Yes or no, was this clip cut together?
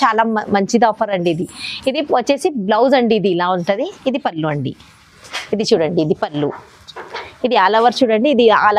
no